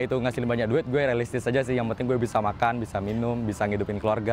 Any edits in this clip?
no; 0 cuts

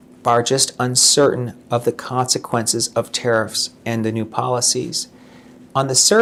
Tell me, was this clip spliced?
no; 0 cuts

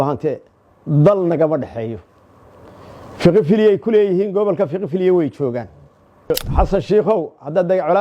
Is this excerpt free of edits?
no; 1 cut; at 6.3 s

